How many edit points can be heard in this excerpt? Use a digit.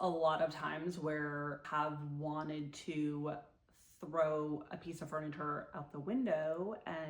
1